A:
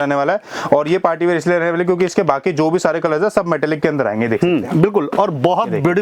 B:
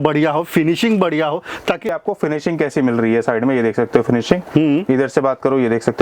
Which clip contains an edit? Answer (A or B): B